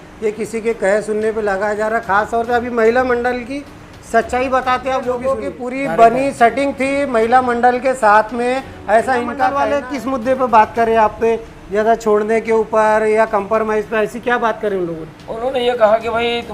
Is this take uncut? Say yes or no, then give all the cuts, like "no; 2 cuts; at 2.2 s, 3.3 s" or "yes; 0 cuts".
no; 2 cuts; at 5.4 s, 9.6 s